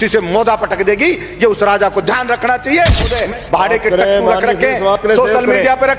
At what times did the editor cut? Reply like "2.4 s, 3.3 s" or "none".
3.2 s